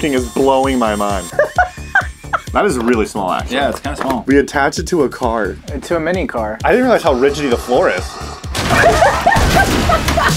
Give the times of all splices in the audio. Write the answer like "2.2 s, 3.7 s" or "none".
1.2 s, 2.5 s, 4.2 s, 6.6 s